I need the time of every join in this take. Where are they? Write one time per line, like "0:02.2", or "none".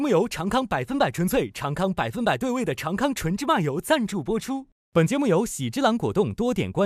none